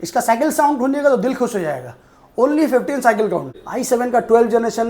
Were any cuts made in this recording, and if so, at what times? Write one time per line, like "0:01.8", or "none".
0:03.6